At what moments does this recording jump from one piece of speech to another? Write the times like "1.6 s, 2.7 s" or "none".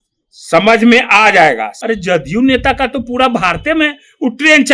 1.7 s

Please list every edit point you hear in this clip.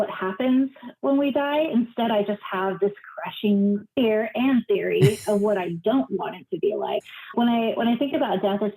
7.0 s

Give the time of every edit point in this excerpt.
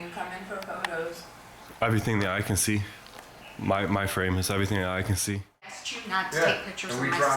5.9 s

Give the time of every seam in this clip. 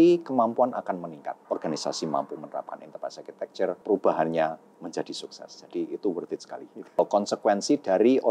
1.4 s, 3.8 s, 7.0 s

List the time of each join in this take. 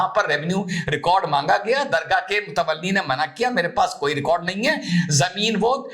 none

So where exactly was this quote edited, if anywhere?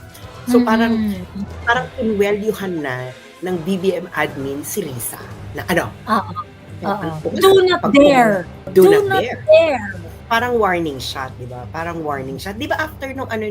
7.2 s, 8.6 s, 10.1 s

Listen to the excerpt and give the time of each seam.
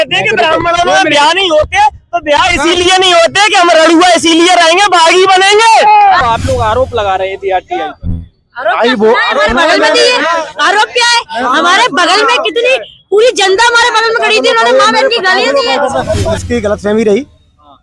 6.2 s, 16.3 s

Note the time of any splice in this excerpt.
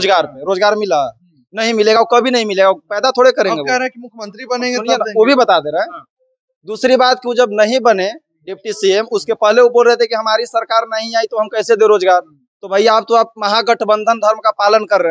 none

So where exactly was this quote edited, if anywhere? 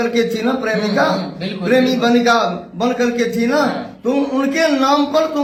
none

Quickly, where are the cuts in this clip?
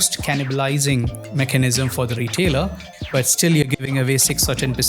1.2 s, 2.9 s

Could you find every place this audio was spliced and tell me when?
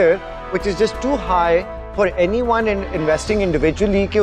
none

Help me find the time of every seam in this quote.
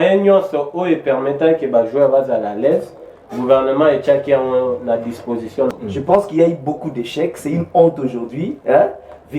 5.7 s

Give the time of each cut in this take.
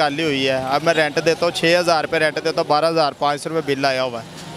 none

